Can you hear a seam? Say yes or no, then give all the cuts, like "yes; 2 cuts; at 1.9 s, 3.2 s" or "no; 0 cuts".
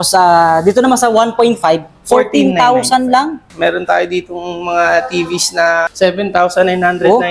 yes; 2 cuts; at 3.5 s, 5.9 s